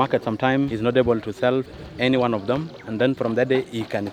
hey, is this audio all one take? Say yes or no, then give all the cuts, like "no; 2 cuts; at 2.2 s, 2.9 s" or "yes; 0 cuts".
yes; 0 cuts